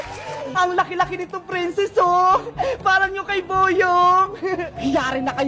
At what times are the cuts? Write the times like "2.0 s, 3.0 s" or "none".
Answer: none